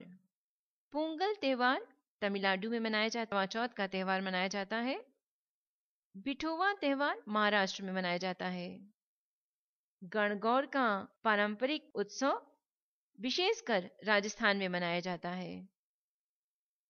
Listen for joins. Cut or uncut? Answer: uncut